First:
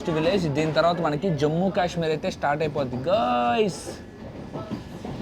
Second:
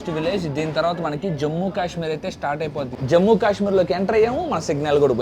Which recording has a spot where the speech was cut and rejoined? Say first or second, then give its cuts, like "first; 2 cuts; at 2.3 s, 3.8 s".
second; 1 cut; at 2.9 s